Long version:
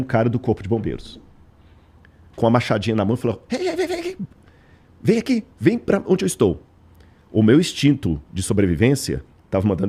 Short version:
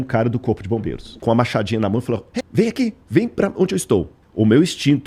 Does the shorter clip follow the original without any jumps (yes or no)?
no